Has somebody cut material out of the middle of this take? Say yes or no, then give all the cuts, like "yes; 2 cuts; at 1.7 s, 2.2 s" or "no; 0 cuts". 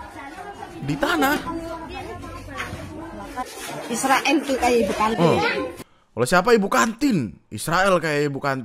yes; 1 cut; at 3.4 s